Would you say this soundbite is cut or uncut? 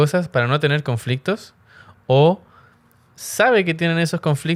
uncut